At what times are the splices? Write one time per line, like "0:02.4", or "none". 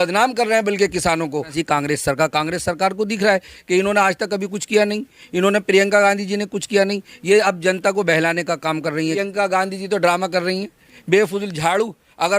0:01.5
0:09.2